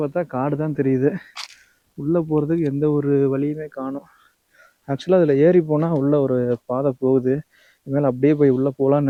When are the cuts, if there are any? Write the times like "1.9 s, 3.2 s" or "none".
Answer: none